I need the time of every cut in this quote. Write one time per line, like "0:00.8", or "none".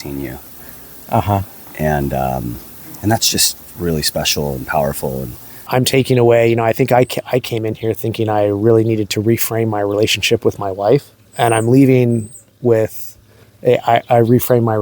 0:05.7
0:11.2